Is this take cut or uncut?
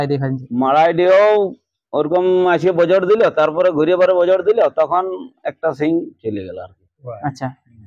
uncut